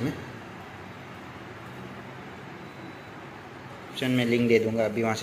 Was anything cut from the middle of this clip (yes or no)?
yes